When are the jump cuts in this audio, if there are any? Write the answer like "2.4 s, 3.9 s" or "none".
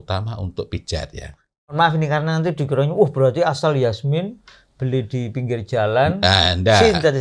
1.7 s